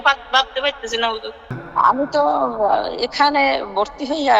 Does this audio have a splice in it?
yes; 1 cut; at 1.6 s

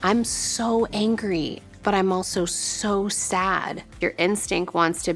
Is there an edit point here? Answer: no; 0 cuts

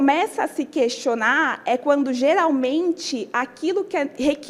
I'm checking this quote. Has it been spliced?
no; 0 cuts

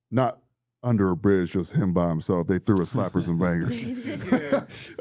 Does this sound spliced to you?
no; 0 cuts

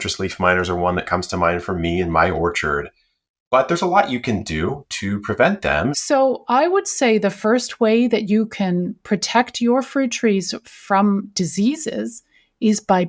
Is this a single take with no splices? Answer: no; 1 cut; at 6.0 s

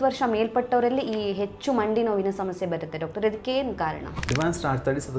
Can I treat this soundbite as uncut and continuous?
no; 1 cut; at 4.2 s

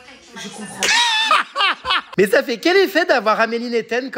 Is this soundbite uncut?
no; 1 cut; at 2.0 s

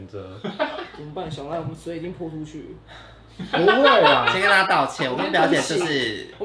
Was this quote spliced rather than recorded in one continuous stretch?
yes; 1 cut; at 1.0 s

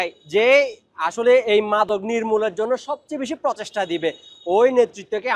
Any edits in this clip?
no; 0 cuts

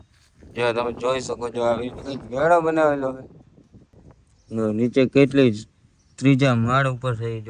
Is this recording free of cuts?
no; 1 cut; at 3.5 s

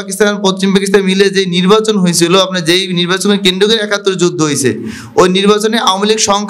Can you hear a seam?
no; 0 cuts

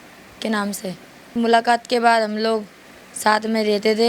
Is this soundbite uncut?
no; 1 cut; at 1.3 s

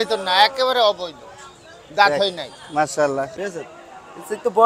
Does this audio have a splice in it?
yes; 1 cut; at 3.3 s

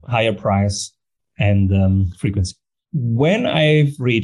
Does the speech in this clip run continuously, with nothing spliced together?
yes; 0 cuts

